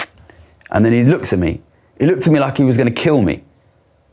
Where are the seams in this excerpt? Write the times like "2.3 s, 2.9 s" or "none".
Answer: none